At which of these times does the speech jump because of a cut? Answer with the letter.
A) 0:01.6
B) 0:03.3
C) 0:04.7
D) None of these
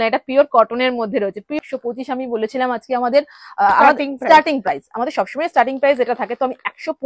A